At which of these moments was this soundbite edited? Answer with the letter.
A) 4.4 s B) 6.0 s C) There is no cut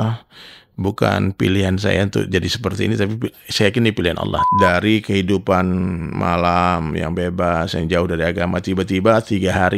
A